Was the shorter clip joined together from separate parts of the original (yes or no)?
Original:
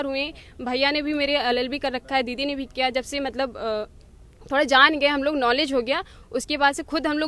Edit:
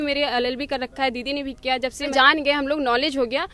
yes